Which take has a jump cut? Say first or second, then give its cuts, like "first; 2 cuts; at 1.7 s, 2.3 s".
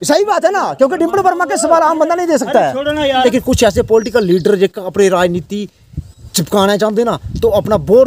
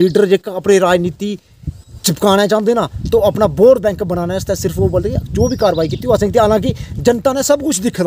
first; 1 cut; at 3.2 s